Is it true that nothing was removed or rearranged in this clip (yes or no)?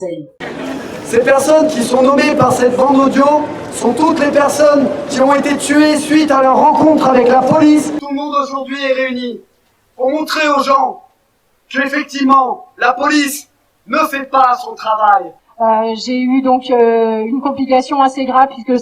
no